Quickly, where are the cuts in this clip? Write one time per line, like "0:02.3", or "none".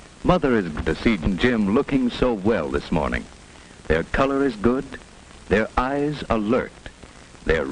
0:01.2

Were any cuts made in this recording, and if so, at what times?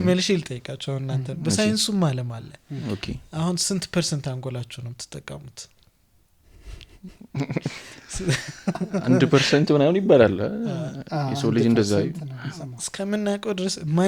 none

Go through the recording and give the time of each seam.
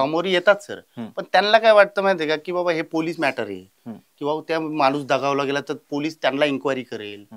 none

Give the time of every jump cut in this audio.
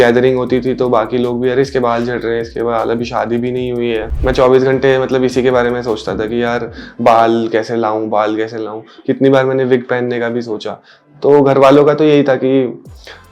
none

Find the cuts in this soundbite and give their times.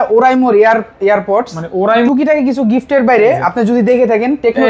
0:02.1

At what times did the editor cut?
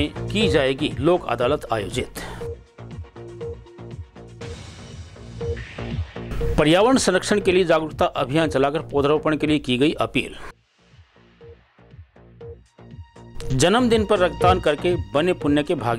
0:13.5

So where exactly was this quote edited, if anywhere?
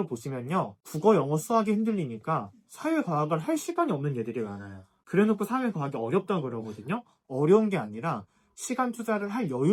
none

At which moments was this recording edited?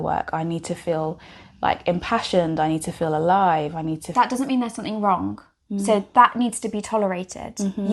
0:04.0

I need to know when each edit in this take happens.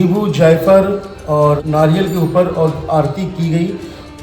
0:01.6

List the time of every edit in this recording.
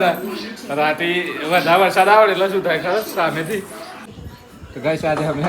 0:04.1

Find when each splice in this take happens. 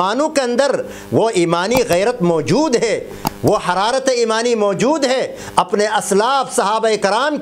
none

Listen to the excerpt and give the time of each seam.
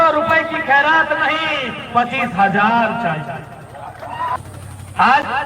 0:04.4

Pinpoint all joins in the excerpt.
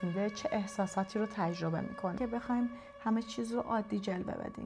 0:02.2

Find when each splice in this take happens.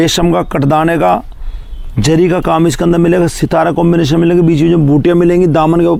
none

